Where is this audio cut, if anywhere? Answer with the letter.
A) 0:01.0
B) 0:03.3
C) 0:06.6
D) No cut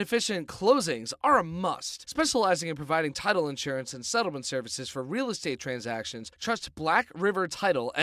A